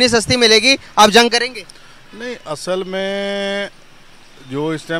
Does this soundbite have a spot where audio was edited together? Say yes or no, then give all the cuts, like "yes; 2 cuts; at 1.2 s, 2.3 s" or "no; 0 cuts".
no; 0 cuts